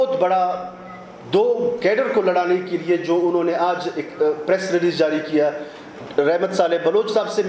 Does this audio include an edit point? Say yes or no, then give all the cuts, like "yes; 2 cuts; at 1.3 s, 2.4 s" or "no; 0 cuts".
no; 0 cuts